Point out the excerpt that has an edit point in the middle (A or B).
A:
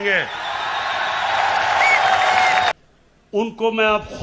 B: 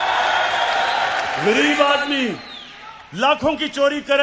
A